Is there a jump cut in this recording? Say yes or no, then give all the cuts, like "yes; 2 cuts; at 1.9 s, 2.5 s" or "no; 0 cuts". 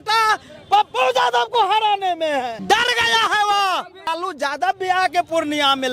yes; 2 cuts; at 2.6 s, 4.1 s